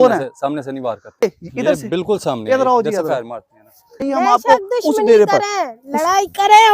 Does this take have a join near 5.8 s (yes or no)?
no